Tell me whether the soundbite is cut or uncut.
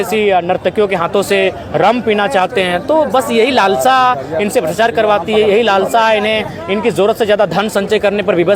uncut